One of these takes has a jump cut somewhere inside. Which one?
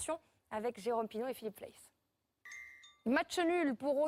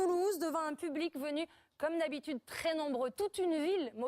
second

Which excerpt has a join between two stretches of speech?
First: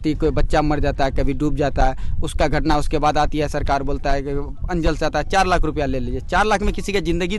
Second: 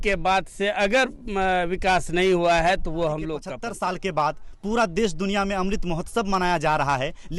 second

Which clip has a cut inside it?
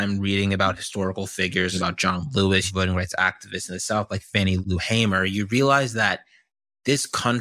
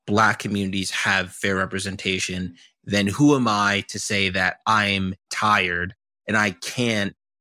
first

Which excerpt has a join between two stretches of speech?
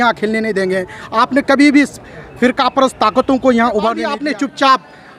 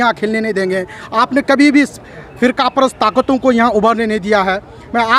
first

